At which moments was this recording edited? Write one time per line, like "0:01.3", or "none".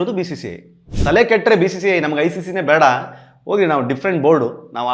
0:00.9